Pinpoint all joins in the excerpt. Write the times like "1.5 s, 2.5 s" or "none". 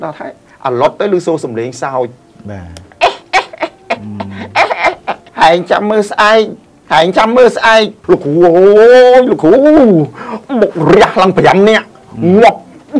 5.3 s, 8.0 s